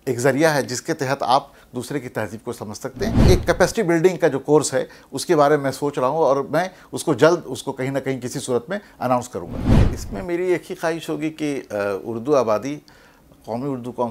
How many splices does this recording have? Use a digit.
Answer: 2